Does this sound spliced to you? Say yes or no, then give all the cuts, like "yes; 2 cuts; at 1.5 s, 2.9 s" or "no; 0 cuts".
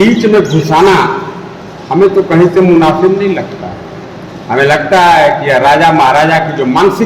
no; 0 cuts